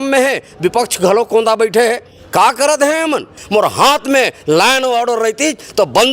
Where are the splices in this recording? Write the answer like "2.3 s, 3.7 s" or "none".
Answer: 3.4 s